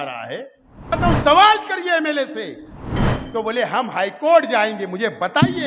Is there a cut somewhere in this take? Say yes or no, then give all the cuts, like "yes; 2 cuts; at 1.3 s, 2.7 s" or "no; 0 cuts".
yes; 2 cuts; at 1.0 s, 3.1 s